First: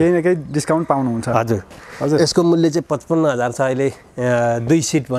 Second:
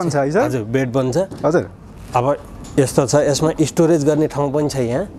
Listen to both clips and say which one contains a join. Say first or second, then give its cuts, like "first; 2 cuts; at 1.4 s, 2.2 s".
first; 1 cut; at 1.8 s